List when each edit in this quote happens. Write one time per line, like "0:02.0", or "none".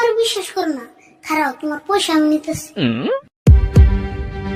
none